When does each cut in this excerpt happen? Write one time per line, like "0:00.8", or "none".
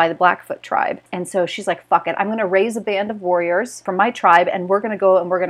0:01.1
0:03.8